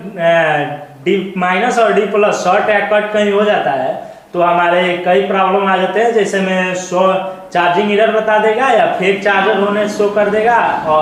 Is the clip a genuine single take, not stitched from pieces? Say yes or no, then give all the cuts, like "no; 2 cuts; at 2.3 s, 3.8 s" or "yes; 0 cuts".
yes; 0 cuts